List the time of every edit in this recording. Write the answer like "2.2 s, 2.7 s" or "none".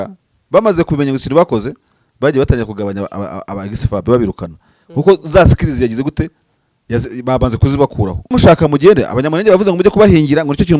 8.3 s